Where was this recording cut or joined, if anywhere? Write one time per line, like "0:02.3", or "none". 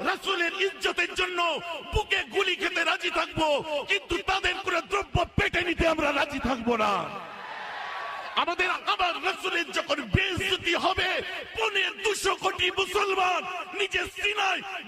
0:08.7